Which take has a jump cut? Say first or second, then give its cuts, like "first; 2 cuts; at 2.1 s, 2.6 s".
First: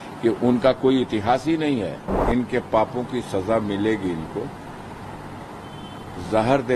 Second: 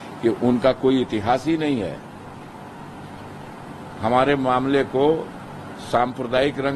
first; 1 cut; at 2.2 s